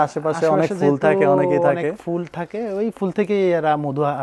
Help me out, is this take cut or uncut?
uncut